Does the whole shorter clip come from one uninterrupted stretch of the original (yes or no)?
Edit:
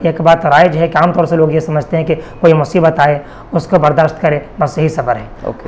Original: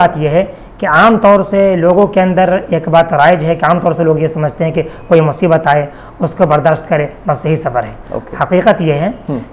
yes